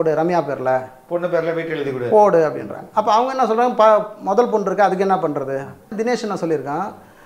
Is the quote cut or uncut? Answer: cut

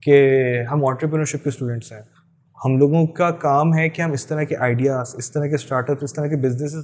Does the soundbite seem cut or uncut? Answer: uncut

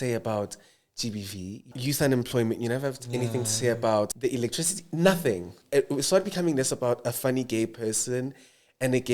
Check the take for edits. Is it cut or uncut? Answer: cut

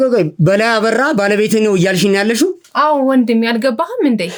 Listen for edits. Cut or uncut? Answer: uncut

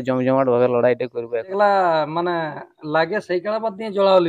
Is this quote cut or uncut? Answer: cut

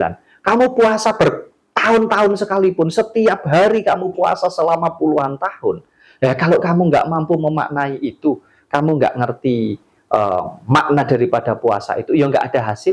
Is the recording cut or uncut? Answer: uncut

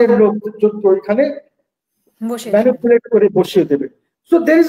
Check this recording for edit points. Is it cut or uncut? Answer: uncut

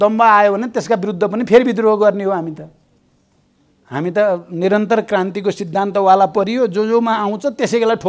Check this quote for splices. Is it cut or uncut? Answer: uncut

